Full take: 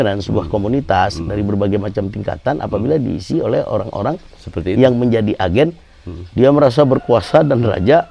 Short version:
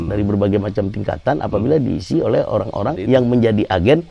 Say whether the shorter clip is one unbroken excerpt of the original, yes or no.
no